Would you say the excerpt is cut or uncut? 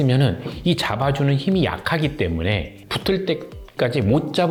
uncut